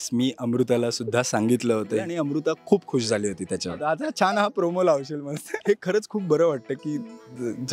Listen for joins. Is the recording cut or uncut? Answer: cut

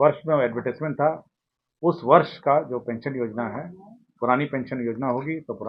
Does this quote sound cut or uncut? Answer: uncut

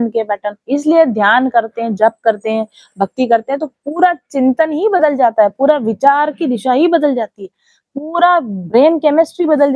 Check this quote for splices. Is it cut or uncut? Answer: uncut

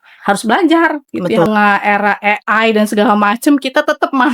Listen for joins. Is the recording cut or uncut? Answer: cut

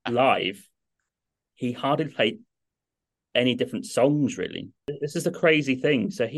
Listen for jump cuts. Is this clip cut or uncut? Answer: cut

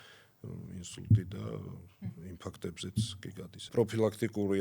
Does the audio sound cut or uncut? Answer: cut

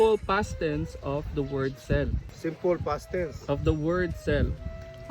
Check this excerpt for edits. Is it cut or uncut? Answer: cut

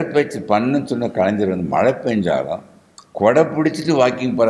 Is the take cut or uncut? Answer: uncut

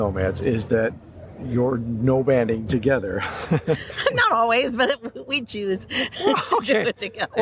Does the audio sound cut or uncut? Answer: uncut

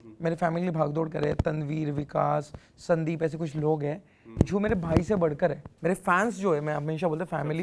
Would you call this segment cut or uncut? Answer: cut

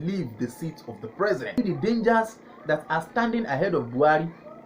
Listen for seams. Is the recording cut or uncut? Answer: cut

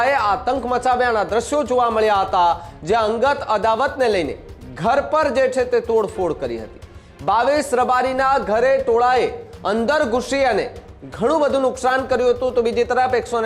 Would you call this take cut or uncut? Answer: uncut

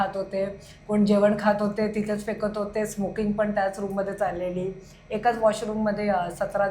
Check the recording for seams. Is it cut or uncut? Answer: uncut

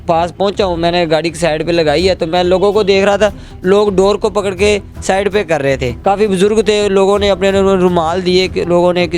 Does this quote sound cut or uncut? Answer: cut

